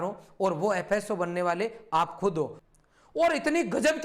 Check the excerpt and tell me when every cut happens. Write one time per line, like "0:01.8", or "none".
0:02.6